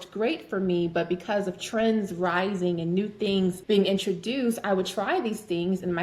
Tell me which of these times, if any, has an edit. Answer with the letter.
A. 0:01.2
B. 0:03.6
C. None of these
B